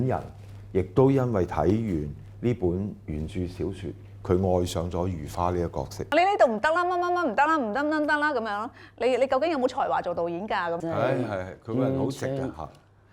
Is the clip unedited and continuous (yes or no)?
no